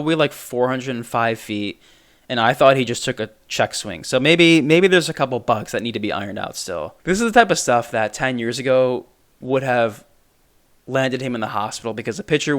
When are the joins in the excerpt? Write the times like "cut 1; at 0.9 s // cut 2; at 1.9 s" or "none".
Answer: cut 1; at 6.9 s